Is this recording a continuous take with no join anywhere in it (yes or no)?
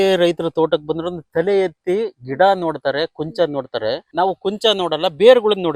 no